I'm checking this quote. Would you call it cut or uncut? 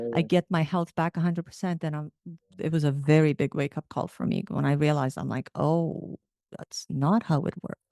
uncut